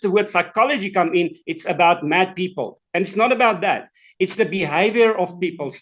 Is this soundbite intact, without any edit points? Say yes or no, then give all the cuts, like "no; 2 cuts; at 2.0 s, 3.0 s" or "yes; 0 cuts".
yes; 0 cuts